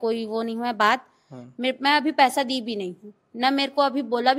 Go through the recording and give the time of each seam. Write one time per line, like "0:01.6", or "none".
none